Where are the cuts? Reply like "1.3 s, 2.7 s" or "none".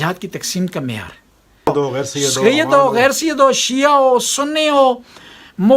1.7 s